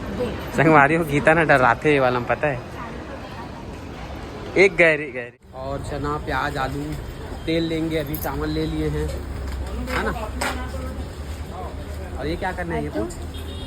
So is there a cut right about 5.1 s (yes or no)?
yes